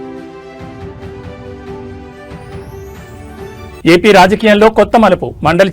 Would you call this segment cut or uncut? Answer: cut